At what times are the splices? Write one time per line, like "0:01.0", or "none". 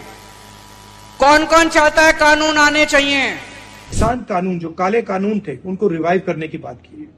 0:04.0

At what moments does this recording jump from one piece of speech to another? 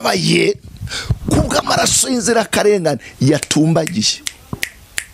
none

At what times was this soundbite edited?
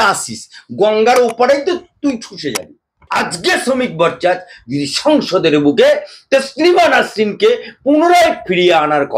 0:03.0

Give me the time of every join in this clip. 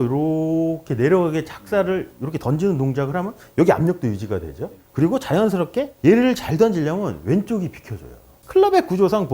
0:08.3

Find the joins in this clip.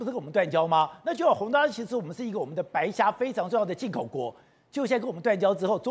none

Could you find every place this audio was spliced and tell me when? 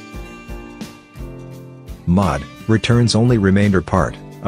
0:02.1

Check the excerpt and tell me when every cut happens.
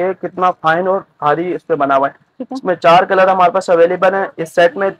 none

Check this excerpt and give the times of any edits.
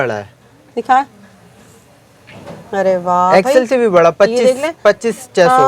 none

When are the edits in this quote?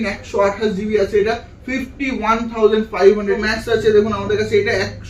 0:03.5

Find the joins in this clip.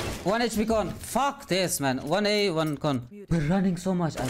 0:03.1

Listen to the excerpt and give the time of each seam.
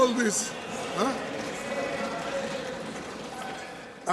none

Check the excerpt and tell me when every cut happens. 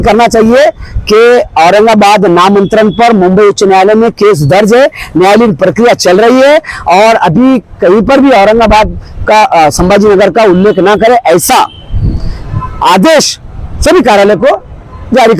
none

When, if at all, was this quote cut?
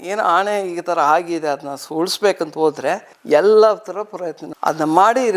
0:03.1

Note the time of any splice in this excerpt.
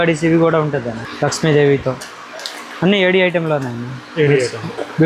0:01.0

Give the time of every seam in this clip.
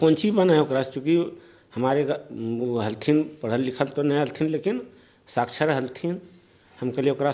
none

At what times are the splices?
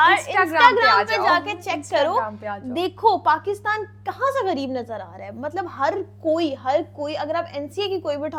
none

